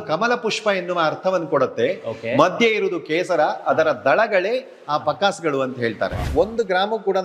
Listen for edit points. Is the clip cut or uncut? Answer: cut